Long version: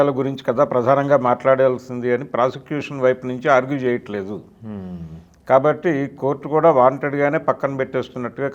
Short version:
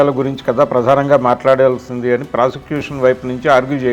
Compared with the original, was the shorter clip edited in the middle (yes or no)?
no